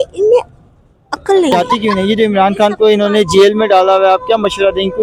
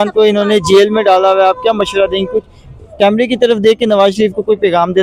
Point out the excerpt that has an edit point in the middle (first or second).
first